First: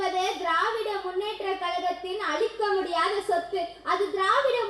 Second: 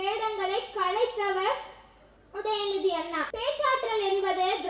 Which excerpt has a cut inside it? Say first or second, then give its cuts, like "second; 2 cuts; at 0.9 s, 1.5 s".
second; 1 cut; at 3.3 s